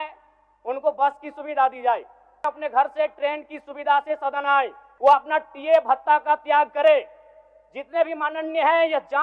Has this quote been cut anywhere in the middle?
yes; 2 cuts; at 2.4 s, 4.8 s

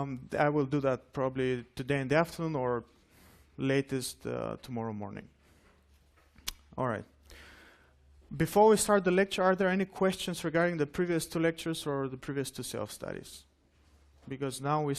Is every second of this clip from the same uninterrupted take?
no; 1 cut; at 12.8 s

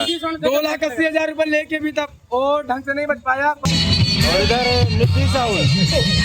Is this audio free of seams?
no; 1 cut; at 3.6 s

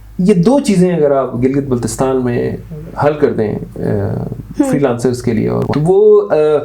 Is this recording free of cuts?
no; 1 cut; at 5.6 s

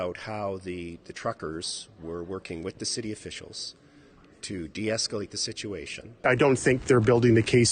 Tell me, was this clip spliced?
yes; 1 cut; at 6.2 s

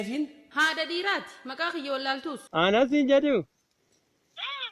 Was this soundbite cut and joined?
yes; 1 cut; at 2.4 s

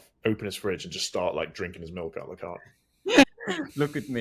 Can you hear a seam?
no; 0 cuts

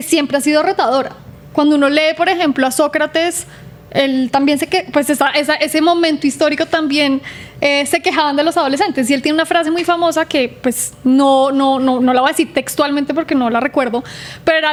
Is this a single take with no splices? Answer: yes; 0 cuts

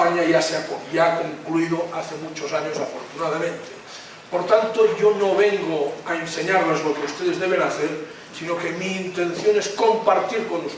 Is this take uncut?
no; 1 cut; at 8.9 s

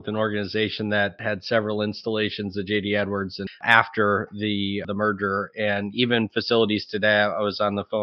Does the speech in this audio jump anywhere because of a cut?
yes; 3 cuts; at 1.2 s, 3.6 s, 4.9 s

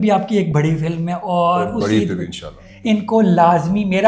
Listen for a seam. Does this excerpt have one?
yes; 1 cut; at 2.6 s

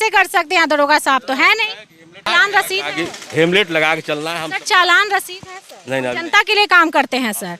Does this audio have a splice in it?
yes; 1 cut; at 2.1 s

